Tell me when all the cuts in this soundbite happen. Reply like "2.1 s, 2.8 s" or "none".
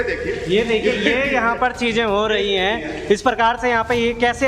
none